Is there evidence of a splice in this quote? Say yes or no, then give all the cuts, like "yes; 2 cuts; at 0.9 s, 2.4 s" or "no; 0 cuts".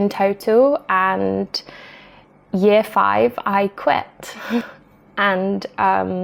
no; 0 cuts